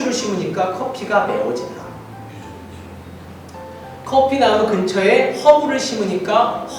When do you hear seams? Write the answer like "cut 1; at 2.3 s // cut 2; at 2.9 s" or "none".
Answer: none